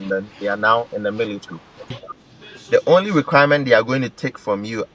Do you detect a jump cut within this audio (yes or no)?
yes